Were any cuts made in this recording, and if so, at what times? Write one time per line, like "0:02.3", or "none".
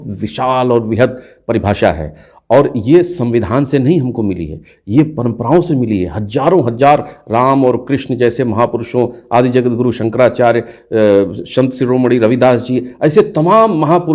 none